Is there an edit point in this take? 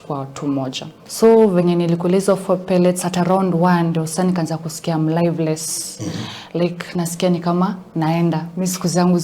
yes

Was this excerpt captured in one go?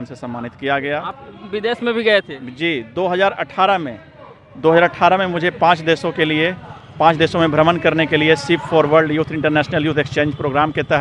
yes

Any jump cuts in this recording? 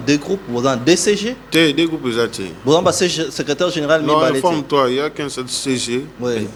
no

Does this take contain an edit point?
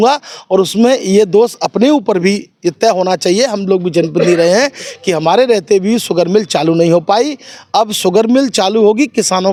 no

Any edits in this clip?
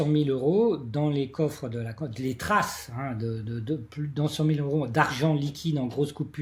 no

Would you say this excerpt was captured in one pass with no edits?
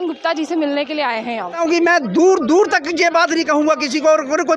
no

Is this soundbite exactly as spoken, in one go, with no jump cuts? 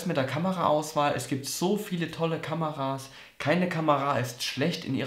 yes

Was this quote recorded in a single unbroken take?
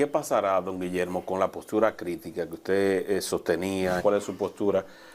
no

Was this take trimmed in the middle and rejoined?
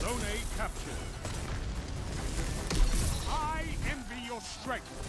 no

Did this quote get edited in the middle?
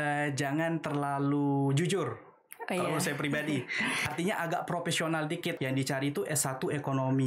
yes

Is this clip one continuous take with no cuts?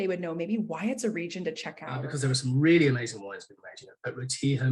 no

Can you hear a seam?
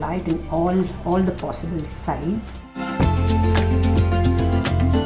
no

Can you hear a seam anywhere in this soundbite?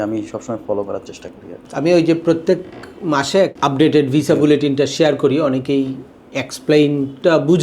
yes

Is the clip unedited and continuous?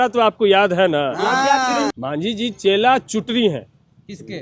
no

